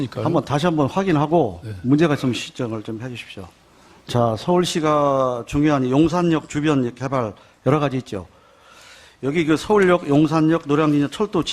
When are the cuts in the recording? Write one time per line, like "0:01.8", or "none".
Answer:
0:05.9